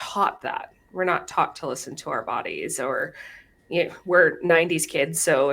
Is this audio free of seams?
yes; 0 cuts

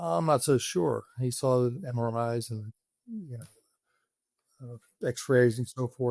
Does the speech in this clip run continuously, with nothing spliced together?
yes; 0 cuts

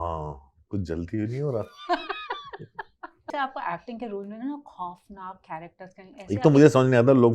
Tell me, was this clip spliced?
yes; 1 cut; at 3.3 s

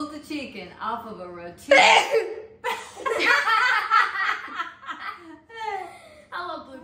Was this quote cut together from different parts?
no; 0 cuts

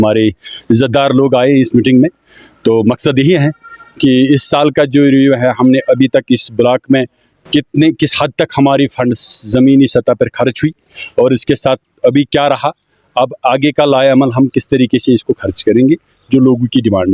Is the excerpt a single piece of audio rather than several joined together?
yes; 0 cuts

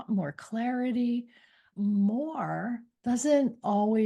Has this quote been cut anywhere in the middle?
yes; 2 cuts; at 1.7 s, 2.9 s

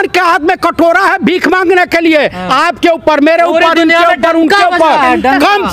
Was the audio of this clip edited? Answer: no; 0 cuts

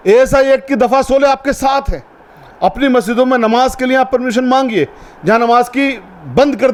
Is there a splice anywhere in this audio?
no; 0 cuts

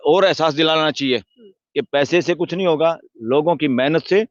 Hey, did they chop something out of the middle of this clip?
no; 0 cuts

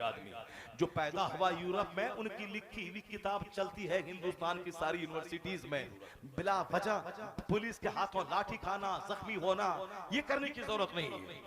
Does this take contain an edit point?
yes; 1 cut; at 6.0 s

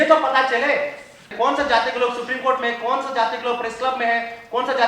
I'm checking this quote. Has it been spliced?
yes; 1 cut; at 1.3 s

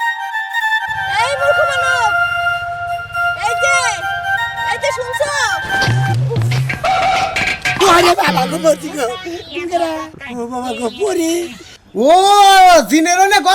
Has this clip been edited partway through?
yes; 1 cut; at 12.0 s

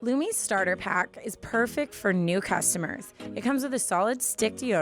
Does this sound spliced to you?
no; 0 cuts

